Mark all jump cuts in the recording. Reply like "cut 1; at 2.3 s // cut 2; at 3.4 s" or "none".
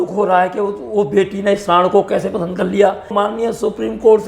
cut 1; at 3.1 s